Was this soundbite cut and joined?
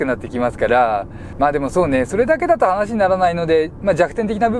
yes; 1 cut; at 1.2 s

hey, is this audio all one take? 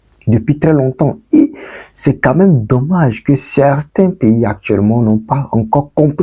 yes; 0 cuts

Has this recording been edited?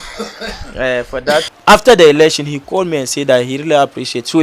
yes; 1 cut; at 1.5 s

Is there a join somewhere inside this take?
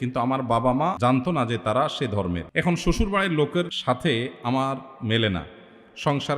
yes; 3 cuts; at 1.0 s, 2.4 s, 3.8 s

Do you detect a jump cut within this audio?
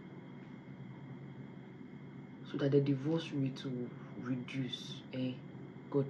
no; 0 cuts

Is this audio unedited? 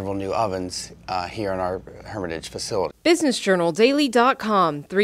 no; 1 cut; at 2.9 s

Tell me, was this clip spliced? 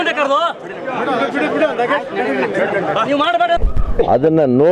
yes; 1 cut; at 3.7 s

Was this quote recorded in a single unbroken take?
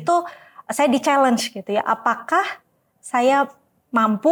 yes; 0 cuts

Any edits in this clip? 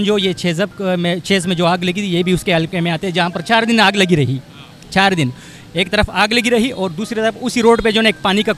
no; 0 cuts

